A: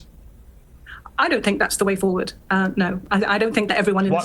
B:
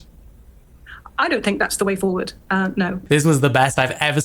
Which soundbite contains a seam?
B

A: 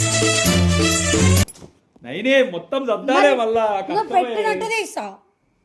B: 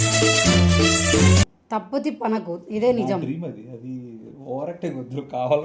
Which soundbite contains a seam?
A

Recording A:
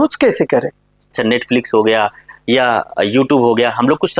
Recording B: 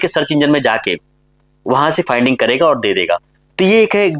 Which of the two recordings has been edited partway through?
A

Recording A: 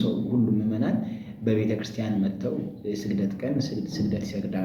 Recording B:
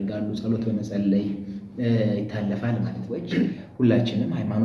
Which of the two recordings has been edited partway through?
B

